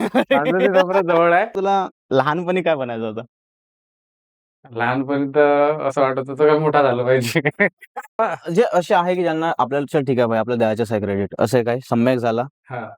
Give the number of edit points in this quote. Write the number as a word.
two